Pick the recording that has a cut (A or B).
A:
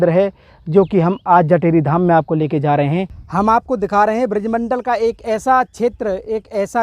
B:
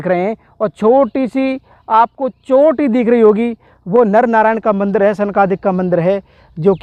A